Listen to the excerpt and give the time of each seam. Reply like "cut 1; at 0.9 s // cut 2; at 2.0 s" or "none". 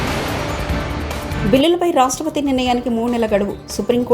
cut 1; at 1.2 s